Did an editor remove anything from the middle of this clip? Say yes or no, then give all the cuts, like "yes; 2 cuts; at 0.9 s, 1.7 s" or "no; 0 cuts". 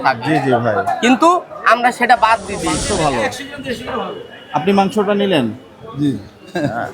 yes; 1 cut; at 2.8 s